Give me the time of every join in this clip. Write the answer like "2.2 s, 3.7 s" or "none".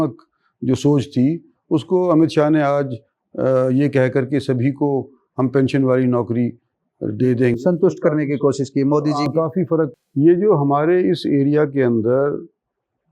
9.9 s

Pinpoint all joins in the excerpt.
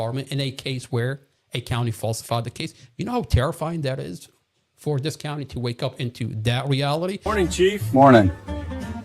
7.2 s

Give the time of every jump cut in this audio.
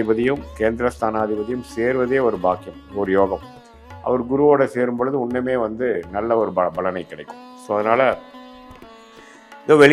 none

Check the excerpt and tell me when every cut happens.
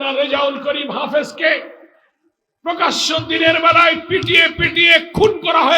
none

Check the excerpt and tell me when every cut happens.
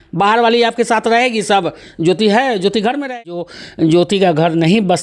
3.6 s

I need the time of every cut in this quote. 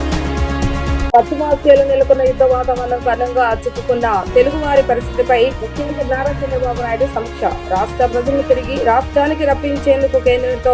1.0 s

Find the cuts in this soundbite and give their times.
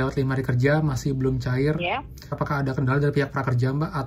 2.3 s

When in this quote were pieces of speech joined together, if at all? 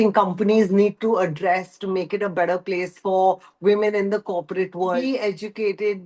5.0 s

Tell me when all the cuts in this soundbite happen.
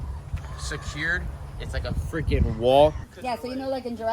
3.0 s

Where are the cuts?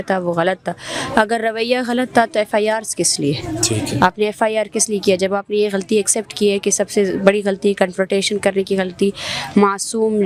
none

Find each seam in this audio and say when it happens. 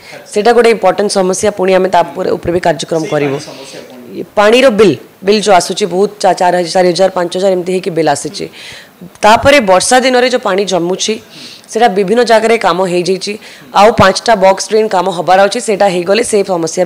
none

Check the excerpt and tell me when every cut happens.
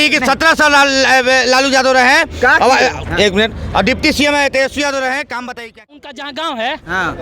6.0 s

